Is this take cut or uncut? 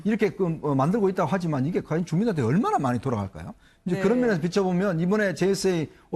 cut